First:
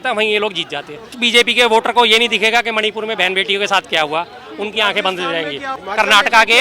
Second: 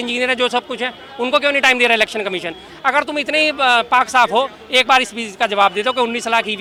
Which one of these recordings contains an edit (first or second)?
first